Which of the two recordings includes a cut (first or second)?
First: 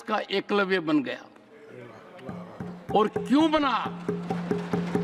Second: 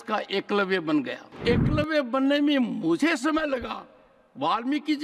second